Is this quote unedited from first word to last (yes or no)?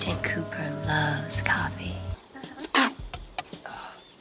no